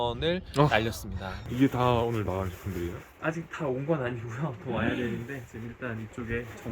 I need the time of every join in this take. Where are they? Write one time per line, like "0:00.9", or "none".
0:01.4